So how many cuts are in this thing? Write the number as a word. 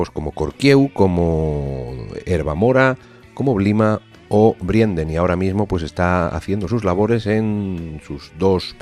one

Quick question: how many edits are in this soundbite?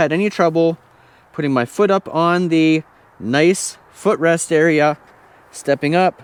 zero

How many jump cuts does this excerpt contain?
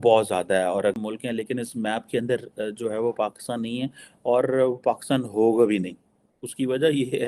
one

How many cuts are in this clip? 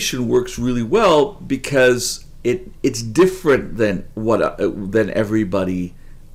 zero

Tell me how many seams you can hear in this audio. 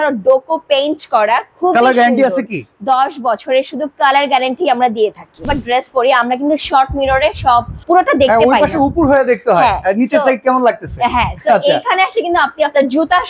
two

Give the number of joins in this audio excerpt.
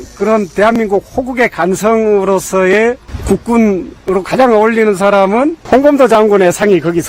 two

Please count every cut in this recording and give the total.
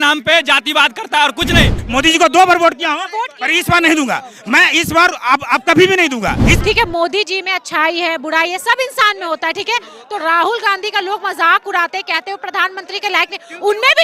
two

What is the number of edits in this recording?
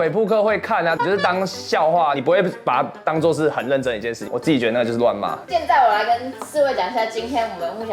zero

